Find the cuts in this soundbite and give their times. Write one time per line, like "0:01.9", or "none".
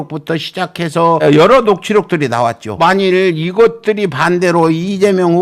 0:01.2
0:02.8